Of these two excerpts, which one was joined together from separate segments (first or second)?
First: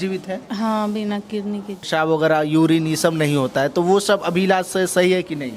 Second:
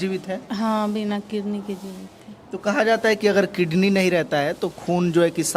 first